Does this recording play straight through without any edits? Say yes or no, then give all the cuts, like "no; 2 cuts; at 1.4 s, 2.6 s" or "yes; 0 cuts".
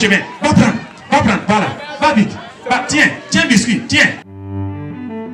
no; 1 cut; at 4.3 s